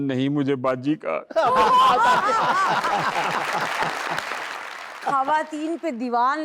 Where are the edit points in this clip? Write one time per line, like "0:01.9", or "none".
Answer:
0:05.0